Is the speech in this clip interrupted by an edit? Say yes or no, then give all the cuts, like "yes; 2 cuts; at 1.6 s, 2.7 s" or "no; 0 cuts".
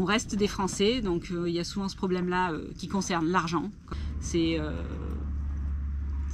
yes; 1 cut; at 3.9 s